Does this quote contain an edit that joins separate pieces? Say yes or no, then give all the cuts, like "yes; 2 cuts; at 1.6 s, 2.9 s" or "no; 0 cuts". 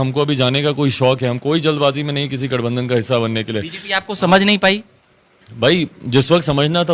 no; 0 cuts